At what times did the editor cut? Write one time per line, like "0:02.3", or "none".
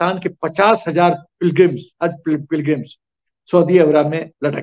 none